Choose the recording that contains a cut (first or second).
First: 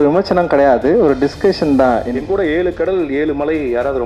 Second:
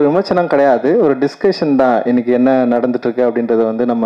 first